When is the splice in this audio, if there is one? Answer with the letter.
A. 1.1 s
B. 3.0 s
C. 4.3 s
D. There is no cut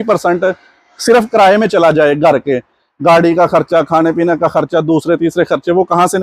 D